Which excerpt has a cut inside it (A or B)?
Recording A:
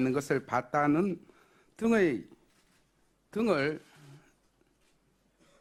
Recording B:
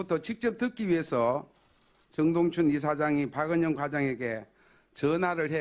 B